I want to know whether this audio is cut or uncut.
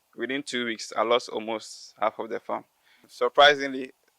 cut